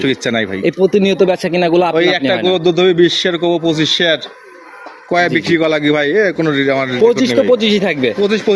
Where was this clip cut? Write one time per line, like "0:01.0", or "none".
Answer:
none